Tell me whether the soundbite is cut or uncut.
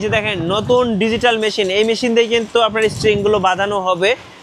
uncut